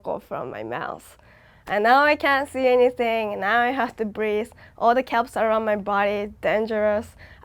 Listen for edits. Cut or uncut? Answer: uncut